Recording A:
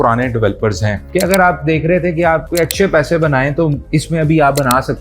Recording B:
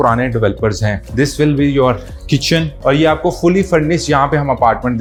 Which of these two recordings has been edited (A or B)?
A